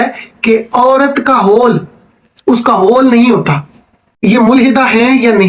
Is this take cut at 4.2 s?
yes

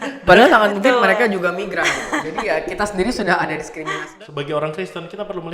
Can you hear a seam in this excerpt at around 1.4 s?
no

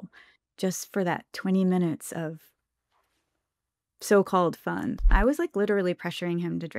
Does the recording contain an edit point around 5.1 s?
yes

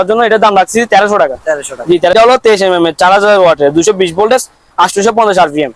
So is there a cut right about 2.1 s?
yes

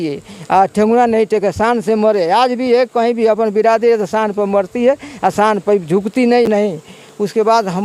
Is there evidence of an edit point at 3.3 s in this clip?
no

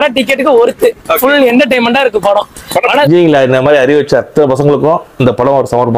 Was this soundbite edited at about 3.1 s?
yes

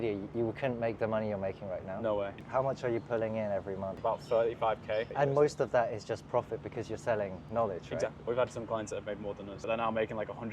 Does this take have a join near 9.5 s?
yes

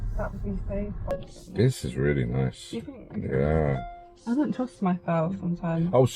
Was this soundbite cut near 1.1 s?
yes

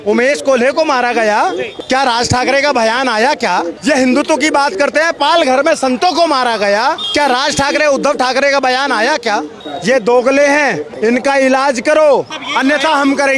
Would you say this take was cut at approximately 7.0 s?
yes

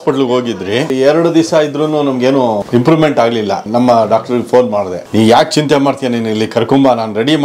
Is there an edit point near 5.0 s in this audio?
yes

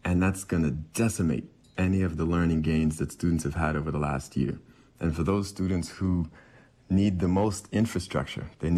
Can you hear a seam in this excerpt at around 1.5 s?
no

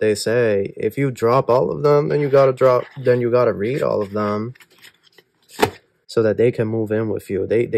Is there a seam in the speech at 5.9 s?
yes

